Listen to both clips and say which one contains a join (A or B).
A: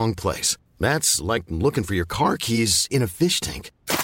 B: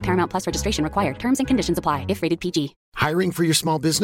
B